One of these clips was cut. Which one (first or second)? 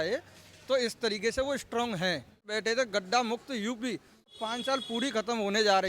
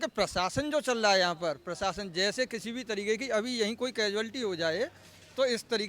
first